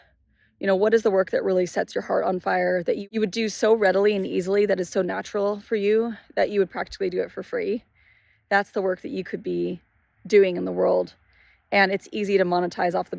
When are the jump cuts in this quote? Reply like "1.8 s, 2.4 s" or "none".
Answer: 3.0 s